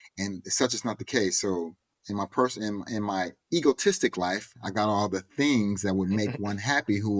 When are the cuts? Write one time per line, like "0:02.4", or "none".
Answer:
none